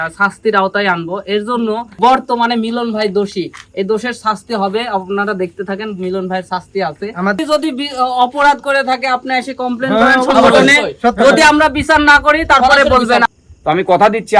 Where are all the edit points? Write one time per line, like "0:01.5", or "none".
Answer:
0:02.0
0:07.4
0:13.2